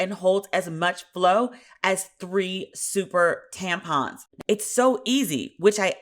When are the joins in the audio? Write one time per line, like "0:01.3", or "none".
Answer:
0:04.3